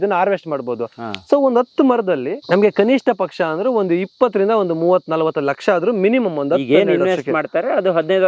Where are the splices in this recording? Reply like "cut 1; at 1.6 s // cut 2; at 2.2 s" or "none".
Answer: cut 1; at 2.3 s